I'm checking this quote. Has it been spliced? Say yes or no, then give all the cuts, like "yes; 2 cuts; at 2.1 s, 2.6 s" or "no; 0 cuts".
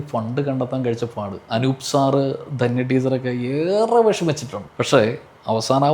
no; 0 cuts